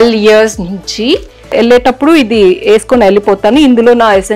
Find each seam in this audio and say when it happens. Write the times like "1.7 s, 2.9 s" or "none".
1.5 s